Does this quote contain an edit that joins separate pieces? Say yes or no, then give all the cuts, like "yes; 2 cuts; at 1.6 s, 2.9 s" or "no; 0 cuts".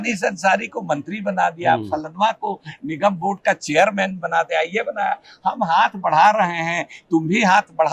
no; 0 cuts